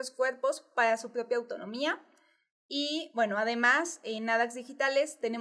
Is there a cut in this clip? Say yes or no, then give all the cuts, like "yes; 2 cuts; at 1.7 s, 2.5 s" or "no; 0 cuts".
no; 0 cuts